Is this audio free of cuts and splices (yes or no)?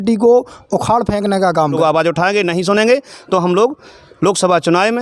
no